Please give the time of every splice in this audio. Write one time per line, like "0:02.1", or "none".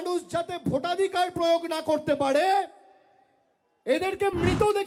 none